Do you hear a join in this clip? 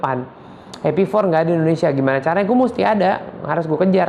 no; 0 cuts

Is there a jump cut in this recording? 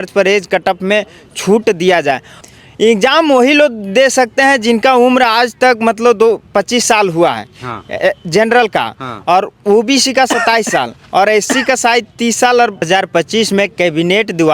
yes; 2 cuts; at 2.3 s, 12.9 s

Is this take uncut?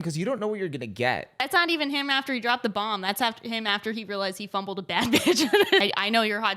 no; 2 cuts; at 1.4 s, 5.8 s

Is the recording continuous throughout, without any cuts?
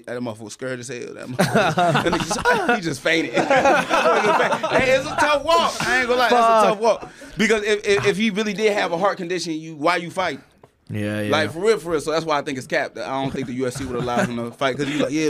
yes; 0 cuts

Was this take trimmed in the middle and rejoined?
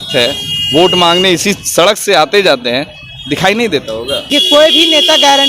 yes; 1 cut; at 4.3 s

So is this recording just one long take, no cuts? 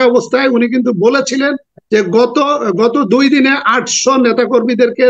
yes; 0 cuts

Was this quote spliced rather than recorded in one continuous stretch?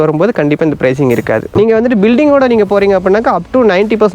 yes; 1 cut; at 1.5 s

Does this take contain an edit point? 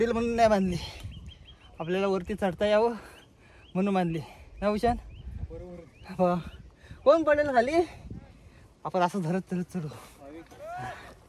no; 0 cuts

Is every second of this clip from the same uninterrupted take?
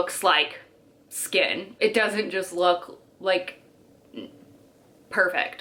yes; 0 cuts

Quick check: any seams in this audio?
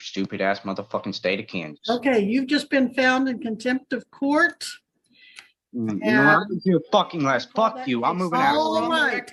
no; 0 cuts

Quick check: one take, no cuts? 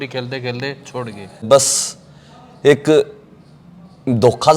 no; 1 cut; at 1.4 s

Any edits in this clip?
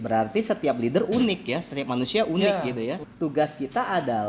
yes; 1 cut; at 3.1 s

